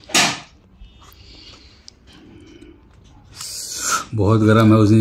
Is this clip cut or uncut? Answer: uncut